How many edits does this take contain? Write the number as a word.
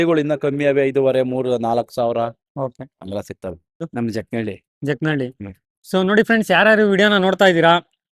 one